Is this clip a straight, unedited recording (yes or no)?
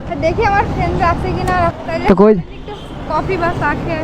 no